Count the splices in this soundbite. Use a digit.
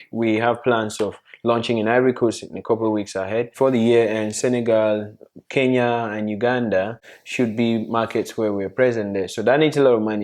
1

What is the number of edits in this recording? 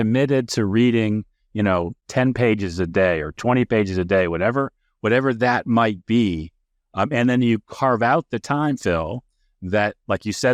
0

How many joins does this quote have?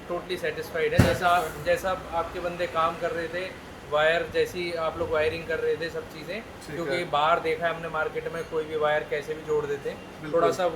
0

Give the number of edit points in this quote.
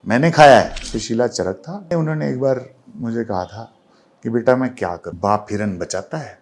3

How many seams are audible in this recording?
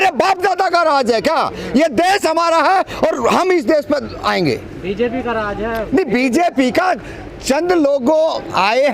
0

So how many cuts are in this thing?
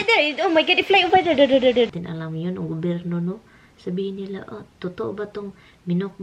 1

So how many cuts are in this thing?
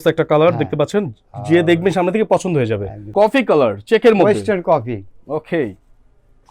1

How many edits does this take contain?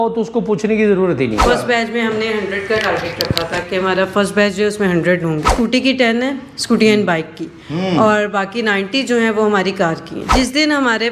3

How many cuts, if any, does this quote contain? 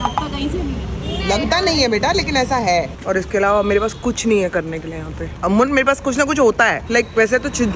2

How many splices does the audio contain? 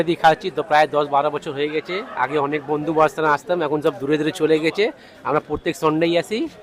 0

